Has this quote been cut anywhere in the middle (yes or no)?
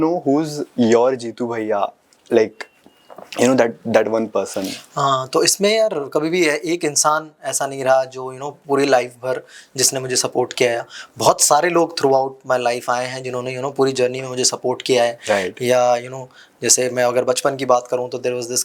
no